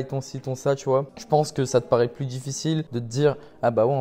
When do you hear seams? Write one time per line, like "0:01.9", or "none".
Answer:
0:01.2
0:03.0